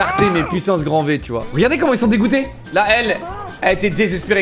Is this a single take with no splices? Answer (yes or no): no